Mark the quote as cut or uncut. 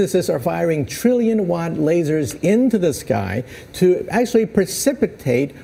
uncut